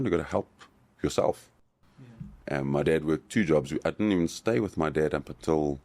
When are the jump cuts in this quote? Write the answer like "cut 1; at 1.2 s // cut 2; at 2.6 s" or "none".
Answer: cut 1; at 1.7 s